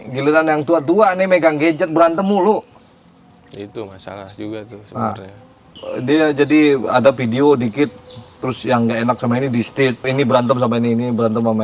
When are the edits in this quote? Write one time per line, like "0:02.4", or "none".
0:10.1